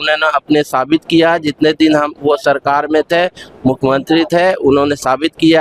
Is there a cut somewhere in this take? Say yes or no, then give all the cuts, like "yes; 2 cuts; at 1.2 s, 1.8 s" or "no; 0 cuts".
no; 0 cuts